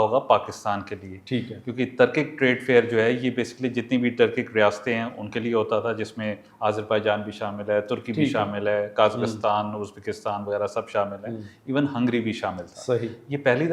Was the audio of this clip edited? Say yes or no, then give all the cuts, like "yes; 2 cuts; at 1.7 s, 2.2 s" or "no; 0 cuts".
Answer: no; 0 cuts